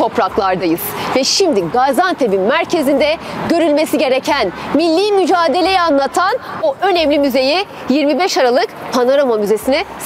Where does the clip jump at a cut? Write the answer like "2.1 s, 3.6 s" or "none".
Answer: none